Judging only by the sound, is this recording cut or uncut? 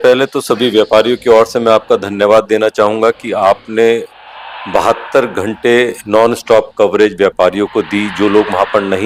uncut